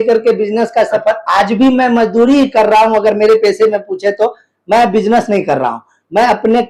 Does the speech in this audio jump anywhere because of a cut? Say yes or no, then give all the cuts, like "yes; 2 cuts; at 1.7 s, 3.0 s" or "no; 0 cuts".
no; 0 cuts